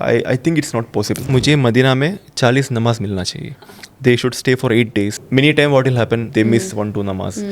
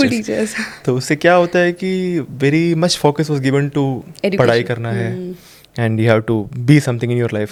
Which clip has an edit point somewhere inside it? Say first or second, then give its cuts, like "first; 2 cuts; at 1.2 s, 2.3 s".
first; 3 cuts; at 1.3 s, 5.2 s, 6.3 s